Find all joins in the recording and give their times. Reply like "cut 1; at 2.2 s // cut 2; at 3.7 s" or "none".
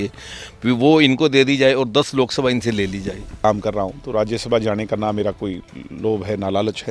cut 1; at 3.3 s

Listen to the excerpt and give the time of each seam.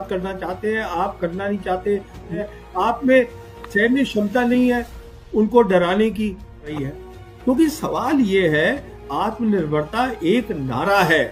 cut 1; at 2.4 s // cut 2; at 7.0 s

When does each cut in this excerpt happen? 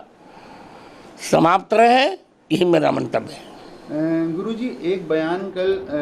none

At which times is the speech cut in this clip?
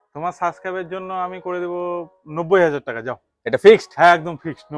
none

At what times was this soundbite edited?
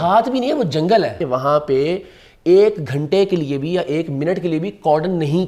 cut 1; at 1.2 s

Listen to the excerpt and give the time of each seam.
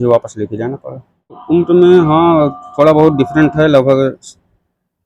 cut 1; at 1.4 s

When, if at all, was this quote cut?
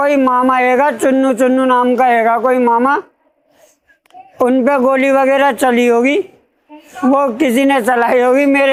none

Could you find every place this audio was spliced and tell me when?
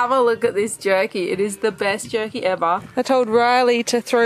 cut 1; at 2.9 s

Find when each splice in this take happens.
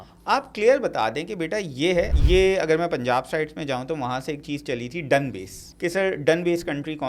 cut 1; at 2.1 s // cut 2; at 5.6 s

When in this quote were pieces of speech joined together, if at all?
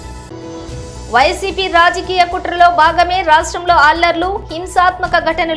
cut 1; at 0.9 s

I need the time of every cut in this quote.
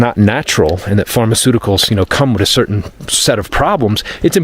none

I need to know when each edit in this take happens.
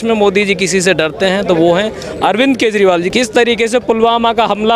cut 1; at 3.1 s

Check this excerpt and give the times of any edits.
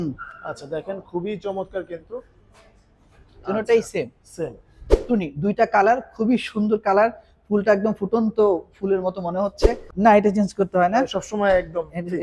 cut 1; at 4.9 s // cut 2; at 9.8 s

